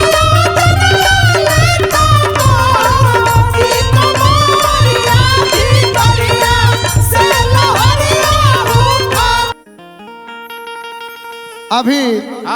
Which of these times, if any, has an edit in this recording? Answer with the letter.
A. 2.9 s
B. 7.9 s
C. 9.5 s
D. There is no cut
C